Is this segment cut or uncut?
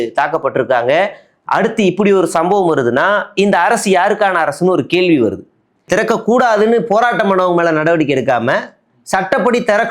cut